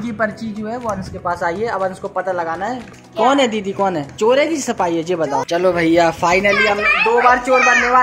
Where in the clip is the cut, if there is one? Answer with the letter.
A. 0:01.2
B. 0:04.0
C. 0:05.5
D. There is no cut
C